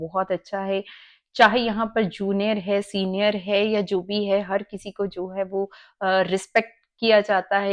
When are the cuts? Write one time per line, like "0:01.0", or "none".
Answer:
none